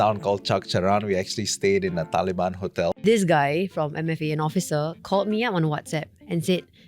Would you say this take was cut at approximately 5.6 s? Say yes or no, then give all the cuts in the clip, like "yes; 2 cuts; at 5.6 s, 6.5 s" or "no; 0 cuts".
no; 1 cut; at 3.0 s